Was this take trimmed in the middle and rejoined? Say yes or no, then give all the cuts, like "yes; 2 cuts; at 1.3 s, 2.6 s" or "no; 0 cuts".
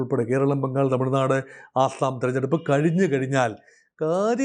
no; 0 cuts